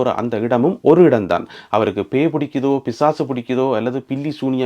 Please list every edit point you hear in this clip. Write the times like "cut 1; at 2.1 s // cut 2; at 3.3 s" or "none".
cut 1; at 1.5 s